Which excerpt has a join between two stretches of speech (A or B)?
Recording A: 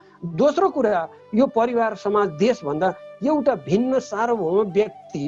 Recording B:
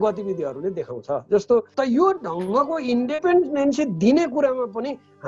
B